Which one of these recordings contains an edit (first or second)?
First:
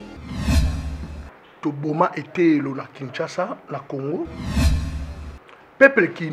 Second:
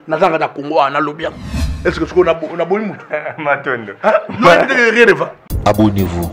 second